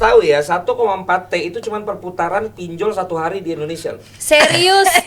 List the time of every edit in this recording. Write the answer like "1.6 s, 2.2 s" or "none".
none